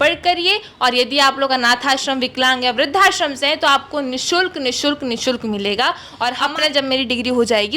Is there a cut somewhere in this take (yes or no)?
yes